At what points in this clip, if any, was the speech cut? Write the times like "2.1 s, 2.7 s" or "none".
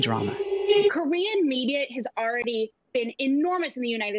0.9 s